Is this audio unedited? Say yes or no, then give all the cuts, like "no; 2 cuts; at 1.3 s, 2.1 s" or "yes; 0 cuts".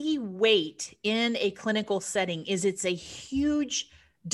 yes; 0 cuts